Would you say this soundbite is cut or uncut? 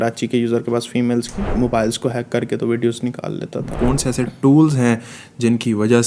cut